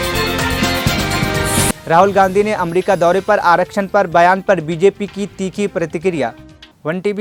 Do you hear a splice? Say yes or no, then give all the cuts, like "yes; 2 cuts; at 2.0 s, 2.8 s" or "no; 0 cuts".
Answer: no; 0 cuts